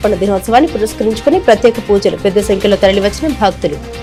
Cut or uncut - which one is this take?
uncut